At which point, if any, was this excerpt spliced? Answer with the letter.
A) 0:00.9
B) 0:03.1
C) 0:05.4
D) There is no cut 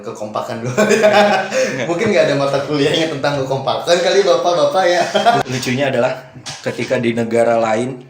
C